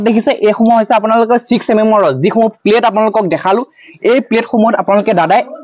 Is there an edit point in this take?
no; 0 cuts

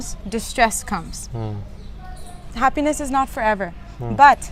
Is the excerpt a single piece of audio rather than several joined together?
yes; 0 cuts

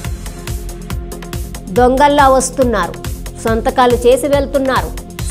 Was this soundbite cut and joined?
yes; 1 cut; at 1.0 s

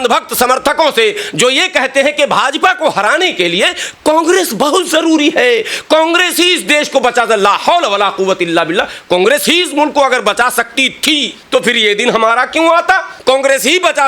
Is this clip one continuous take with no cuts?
no; 2 cuts; at 11.3 s, 13.1 s

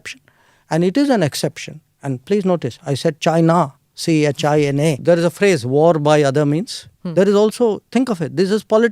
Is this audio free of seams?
no; 1 cut; at 5.0 s

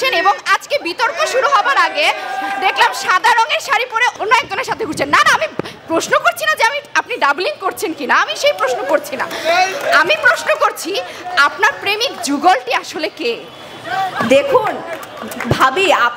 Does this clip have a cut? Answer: no; 0 cuts

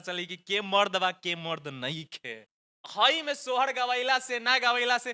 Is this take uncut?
yes; 0 cuts

